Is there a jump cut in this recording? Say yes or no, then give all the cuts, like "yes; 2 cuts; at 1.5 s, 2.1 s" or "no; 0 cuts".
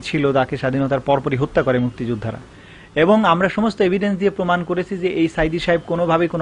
no; 0 cuts